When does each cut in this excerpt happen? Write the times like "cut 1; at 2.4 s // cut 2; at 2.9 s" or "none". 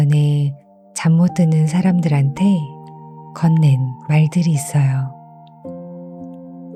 none